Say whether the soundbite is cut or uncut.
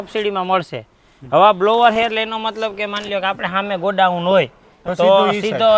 uncut